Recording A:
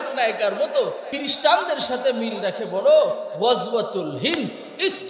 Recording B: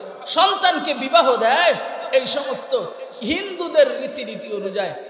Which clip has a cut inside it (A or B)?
A